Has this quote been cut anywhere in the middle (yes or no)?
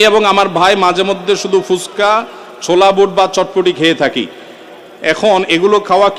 no